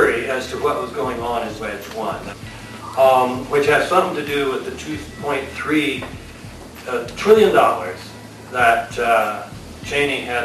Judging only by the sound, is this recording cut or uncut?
cut